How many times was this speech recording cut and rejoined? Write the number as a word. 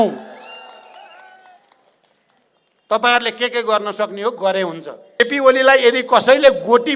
one